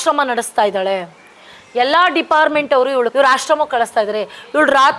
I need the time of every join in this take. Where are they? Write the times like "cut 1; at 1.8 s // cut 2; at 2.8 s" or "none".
cut 1; at 3.1 s

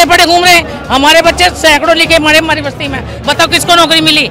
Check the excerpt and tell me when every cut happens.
none

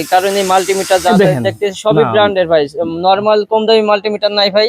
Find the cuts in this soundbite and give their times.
none

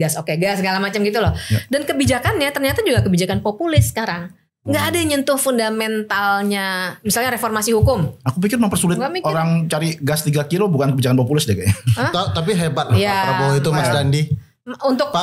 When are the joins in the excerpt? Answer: none

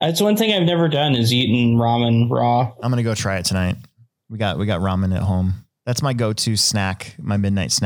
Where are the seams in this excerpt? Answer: cut 1; at 5.7 s

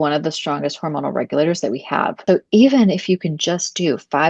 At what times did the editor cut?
cut 1; at 2.2 s

